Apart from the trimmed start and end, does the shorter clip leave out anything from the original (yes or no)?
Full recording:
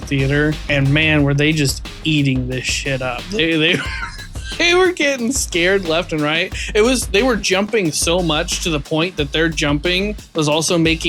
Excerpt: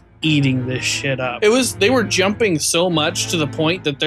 yes